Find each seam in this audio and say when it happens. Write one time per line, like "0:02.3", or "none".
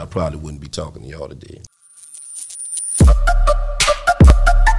0:01.6